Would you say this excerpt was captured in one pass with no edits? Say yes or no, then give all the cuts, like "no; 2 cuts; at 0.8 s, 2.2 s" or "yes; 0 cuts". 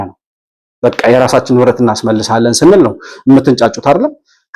yes; 0 cuts